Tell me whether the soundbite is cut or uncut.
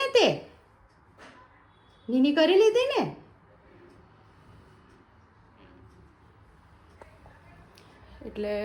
uncut